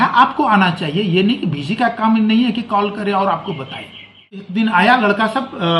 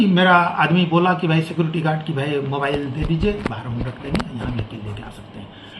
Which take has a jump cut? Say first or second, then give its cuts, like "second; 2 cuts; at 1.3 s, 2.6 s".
first; 1 cut; at 4.5 s